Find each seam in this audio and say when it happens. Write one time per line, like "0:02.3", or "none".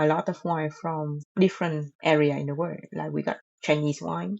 0:01.2
0:01.9